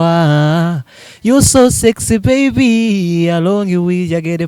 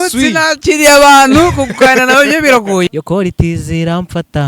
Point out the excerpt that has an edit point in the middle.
second; 1 cut; at 2.9 s

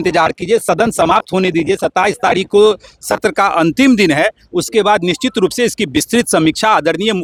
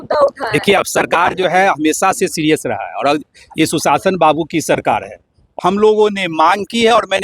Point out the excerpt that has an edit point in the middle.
second; 1 cut; at 5.4 s

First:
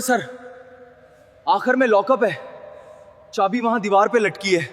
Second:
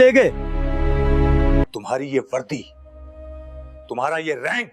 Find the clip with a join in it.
second; 1 cut; at 1.6 s

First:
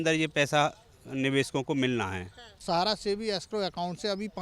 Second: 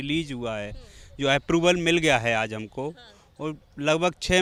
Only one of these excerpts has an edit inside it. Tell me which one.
first; 1 cut; at 2.6 s

